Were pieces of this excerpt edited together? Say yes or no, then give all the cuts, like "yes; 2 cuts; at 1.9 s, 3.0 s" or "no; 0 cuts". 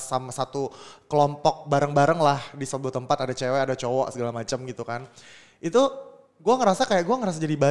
no; 0 cuts